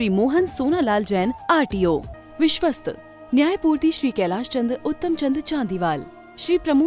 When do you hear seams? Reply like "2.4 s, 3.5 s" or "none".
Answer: 2.1 s

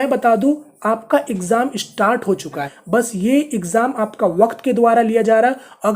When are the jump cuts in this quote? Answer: 2.7 s

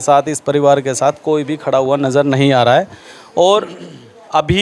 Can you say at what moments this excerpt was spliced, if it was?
none

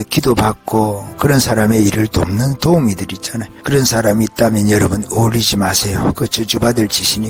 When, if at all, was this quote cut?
none

